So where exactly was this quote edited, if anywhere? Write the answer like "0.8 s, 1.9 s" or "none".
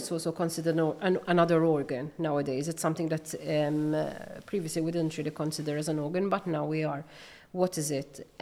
none